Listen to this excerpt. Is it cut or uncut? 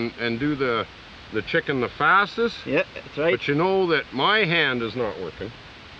uncut